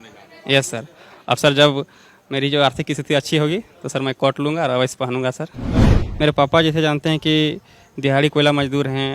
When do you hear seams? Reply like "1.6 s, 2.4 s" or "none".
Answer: 6.0 s